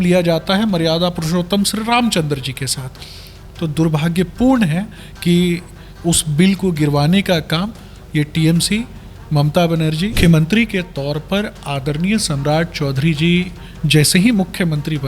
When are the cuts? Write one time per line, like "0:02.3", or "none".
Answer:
0:10.2